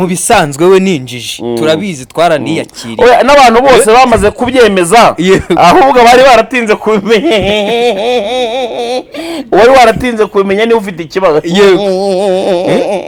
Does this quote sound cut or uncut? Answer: uncut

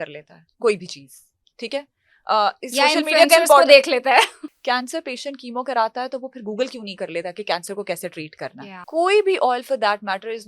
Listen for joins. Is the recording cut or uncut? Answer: cut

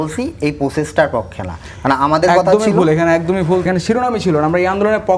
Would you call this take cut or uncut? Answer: cut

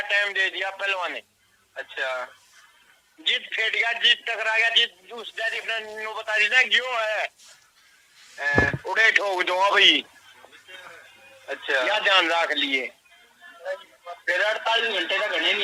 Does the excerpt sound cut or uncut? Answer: uncut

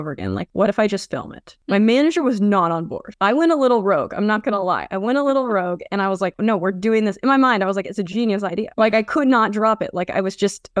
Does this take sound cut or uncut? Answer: uncut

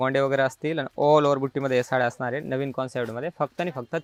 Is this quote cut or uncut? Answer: uncut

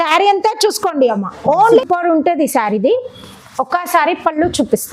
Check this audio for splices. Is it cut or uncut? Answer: cut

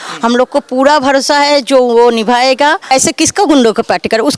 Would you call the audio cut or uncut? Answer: cut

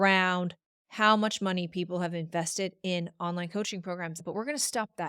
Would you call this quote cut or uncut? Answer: cut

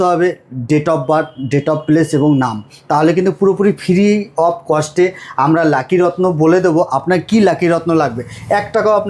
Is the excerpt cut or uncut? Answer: uncut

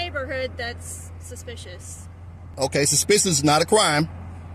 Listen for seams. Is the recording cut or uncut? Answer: uncut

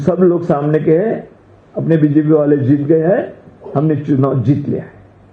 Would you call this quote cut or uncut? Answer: uncut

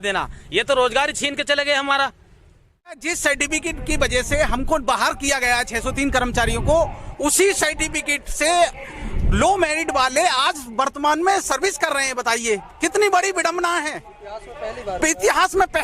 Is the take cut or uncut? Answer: cut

